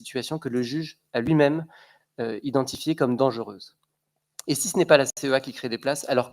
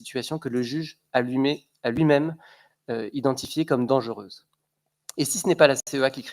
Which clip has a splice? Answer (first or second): first